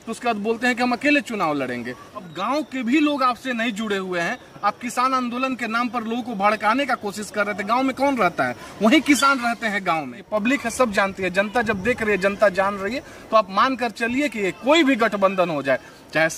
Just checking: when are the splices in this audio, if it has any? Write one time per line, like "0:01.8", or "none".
0:02.2
0:10.2